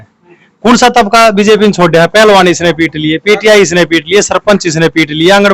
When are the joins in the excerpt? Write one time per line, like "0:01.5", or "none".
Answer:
none